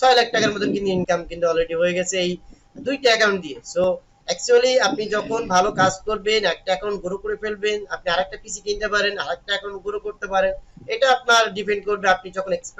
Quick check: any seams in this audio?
yes; 2 cuts; at 1.0 s, 3.7 s

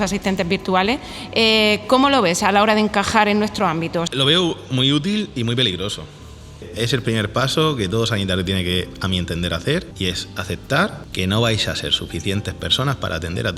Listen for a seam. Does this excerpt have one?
yes; 4 cuts; at 4.1 s, 6.6 s, 9.9 s, 11.0 s

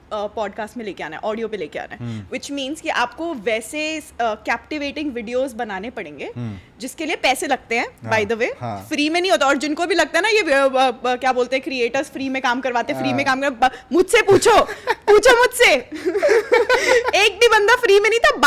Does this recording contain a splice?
no; 0 cuts

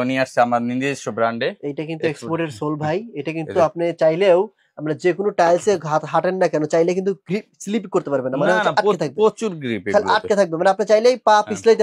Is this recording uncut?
yes; 0 cuts

